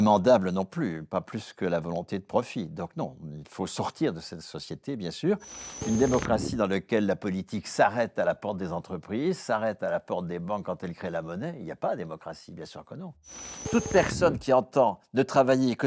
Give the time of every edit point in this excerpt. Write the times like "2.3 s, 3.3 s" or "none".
5.5 s, 13.5 s